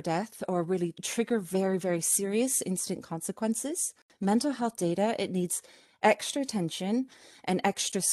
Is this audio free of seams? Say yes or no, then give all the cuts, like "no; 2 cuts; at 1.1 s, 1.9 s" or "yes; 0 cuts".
no; 2 cuts; at 1.0 s, 4.1 s